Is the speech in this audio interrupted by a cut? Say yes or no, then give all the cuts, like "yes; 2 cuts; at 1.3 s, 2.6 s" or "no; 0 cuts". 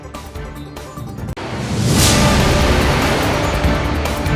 yes; 1 cut; at 1.3 s